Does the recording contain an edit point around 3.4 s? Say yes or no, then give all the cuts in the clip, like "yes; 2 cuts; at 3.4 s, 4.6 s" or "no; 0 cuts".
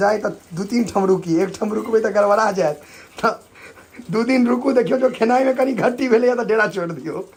no; 0 cuts